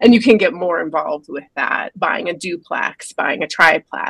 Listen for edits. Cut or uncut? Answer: cut